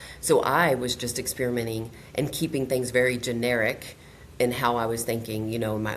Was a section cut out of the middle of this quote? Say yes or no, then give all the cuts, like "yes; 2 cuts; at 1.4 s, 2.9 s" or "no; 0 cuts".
no; 0 cuts